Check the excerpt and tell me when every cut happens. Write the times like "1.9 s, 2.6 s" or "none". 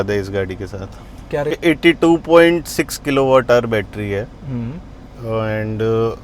1.6 s